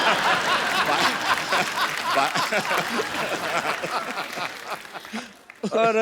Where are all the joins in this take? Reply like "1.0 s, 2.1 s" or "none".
2.9 s